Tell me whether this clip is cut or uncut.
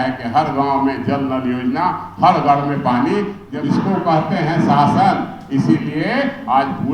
cut